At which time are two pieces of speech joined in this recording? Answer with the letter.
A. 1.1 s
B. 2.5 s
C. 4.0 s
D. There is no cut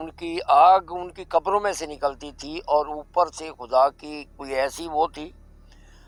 D